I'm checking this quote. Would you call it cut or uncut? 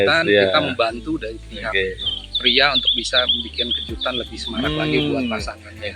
uncut